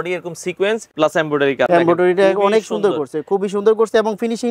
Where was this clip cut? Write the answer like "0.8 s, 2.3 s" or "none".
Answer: 1.3 s